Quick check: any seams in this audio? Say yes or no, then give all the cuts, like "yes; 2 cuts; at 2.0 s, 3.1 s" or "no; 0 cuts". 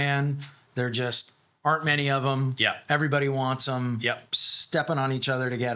yes; 1 cut; at 4.3 s